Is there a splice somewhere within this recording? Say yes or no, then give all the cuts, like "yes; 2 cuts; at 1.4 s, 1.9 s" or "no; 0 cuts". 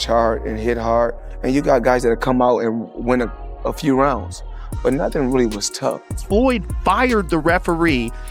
yes; 1 cut; at 6.1 s